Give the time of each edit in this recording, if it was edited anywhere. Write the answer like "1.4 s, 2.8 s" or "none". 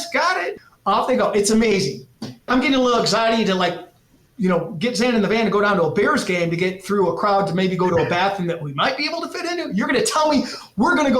2.5 s